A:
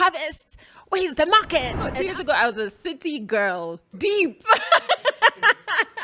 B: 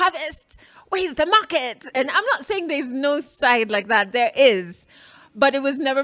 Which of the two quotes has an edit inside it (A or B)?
A